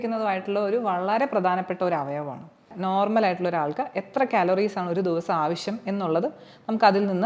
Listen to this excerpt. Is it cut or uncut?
cut